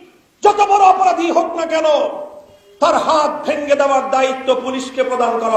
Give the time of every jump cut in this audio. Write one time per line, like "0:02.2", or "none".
none

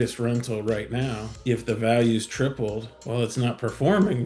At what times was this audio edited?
0:01.3
0:02.9

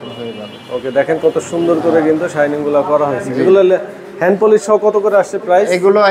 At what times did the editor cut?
none

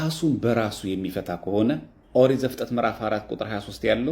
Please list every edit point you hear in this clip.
0:01.9

